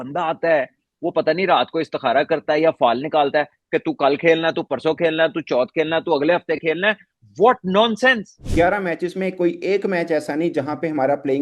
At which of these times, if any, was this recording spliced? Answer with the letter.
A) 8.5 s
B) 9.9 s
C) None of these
A